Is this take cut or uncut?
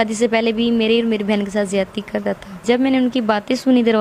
cut